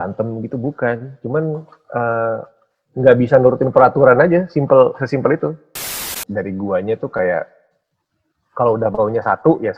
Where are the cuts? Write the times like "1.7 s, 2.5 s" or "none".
6.2 s